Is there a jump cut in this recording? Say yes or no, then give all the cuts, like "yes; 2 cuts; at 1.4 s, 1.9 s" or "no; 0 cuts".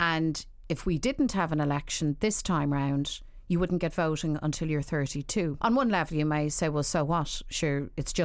yes; 1 cut; at 5.6 s